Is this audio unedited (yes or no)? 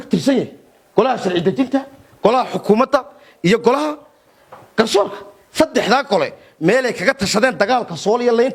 yes